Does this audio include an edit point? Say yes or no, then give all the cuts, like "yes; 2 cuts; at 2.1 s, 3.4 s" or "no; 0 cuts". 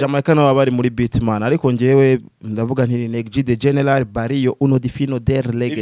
no; 0 cuts